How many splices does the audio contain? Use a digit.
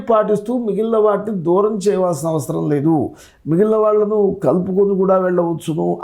0